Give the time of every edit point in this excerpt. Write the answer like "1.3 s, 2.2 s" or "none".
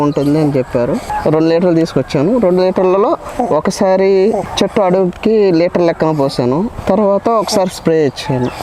1.1 s, 4.5 s, 6.8 s

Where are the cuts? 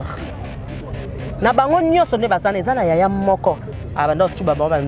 none

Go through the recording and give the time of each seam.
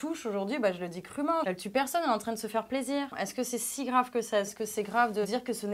1.5 s, 3.1 s

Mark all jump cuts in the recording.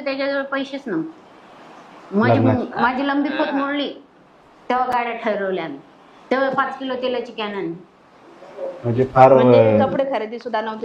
none

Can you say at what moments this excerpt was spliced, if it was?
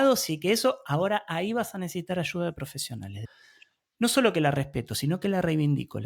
3.2 s

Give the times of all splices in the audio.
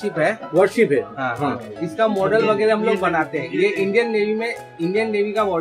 none

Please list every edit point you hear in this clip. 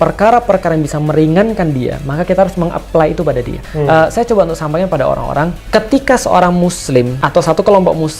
3.6 s, 5.6 s, 7.2 s

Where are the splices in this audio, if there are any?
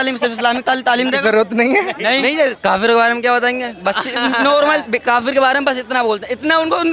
2.6 s

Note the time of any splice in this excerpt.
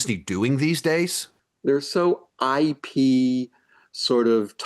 1.4 s

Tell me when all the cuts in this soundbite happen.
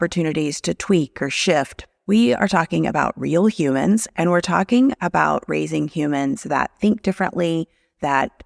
1.8 s

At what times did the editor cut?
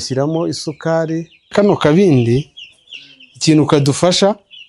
1.4 s

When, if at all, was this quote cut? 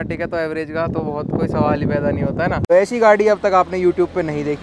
2.7 s

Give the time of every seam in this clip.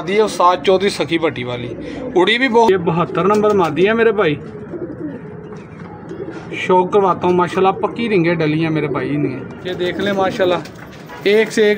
2.7 s, 9.6 s

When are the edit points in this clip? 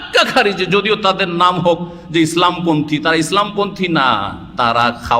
none

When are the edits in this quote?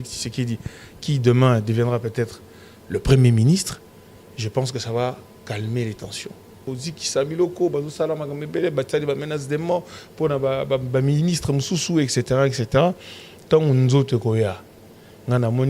6.6 s

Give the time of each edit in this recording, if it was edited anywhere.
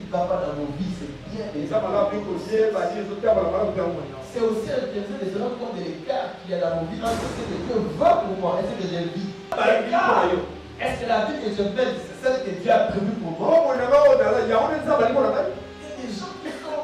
9.5 s

